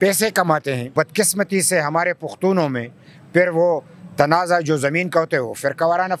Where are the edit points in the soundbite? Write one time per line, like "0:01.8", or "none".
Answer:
0:00.9